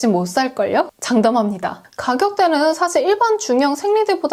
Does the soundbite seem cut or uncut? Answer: uncut